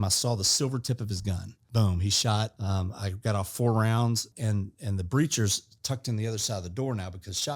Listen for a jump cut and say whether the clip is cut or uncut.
cut